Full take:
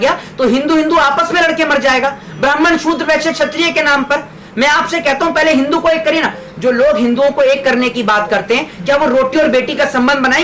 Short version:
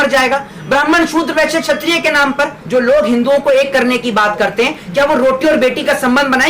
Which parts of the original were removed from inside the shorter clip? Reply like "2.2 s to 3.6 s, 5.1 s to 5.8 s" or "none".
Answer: 4.3 s to 6.5 s